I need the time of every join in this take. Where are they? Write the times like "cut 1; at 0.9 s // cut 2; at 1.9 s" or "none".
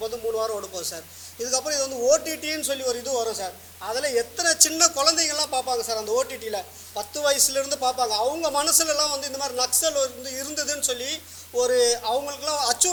none